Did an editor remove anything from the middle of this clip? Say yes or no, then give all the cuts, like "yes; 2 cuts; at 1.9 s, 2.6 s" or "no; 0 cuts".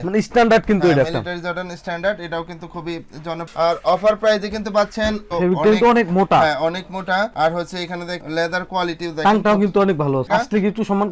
yes; 3 cuts; at 3.5 s, 5.2 s, 10.3 s